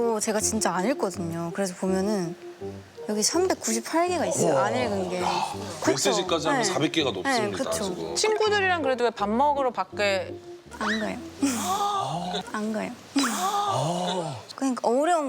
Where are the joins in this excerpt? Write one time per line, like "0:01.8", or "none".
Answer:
0:08.1

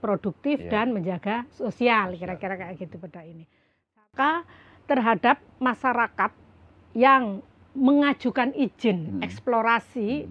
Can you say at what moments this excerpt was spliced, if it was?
0:04.0

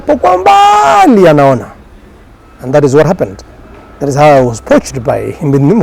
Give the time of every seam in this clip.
none

